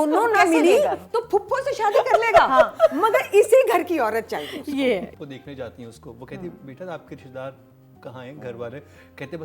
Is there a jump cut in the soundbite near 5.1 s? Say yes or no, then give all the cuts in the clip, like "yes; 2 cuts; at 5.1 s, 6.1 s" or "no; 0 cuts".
yes; 1 cut; at 5.1 s